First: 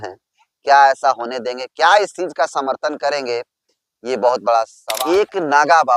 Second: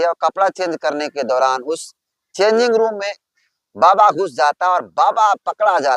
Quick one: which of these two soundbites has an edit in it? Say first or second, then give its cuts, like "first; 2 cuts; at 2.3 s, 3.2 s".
first; 1 cut; at 4.8 s